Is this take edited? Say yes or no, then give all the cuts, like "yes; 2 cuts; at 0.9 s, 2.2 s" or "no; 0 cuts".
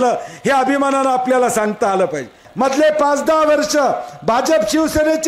yes; 1 cut; at 2.4 s